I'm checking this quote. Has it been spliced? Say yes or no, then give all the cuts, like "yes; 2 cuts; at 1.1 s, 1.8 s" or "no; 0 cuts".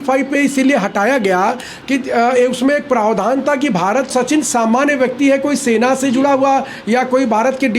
yes; 1 cut; at 4.1 s